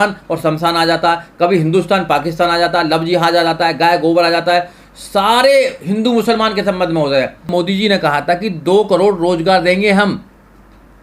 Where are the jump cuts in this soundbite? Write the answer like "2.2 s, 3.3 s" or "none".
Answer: 7.5 s